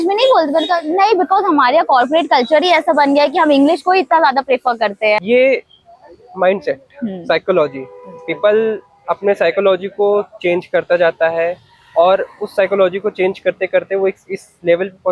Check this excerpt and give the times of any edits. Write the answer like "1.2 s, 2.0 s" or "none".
5.2 s